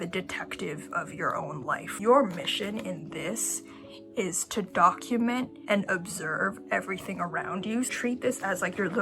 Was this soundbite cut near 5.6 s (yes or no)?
yes